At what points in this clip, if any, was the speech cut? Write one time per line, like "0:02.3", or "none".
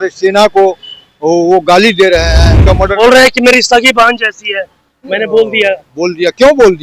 0:02.5